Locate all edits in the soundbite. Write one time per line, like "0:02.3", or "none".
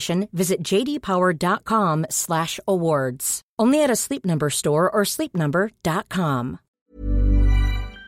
0:06.8